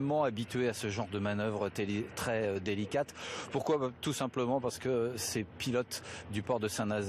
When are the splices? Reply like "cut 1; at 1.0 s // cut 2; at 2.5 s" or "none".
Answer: cut 1; at 4.0 s

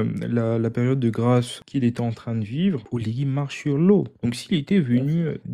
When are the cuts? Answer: cut 1; at 1.6 s // cut 2; at 2.8 s // cut 3; at 4.1 s

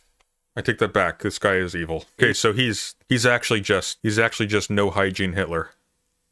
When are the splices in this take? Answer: cut 1; at 2.2 s // cut 2; at 2.9 s // cut 3; at 3.9 s

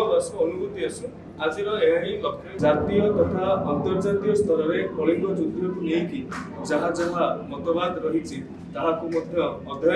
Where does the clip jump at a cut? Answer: cut 1; at 2.5 s

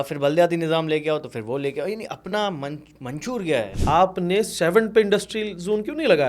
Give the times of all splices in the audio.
cut 1; at 3.7 s

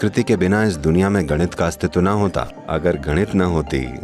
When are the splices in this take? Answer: none

